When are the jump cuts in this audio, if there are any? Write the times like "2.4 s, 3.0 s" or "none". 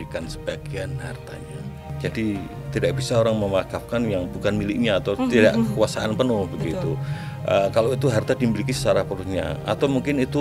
1.9 s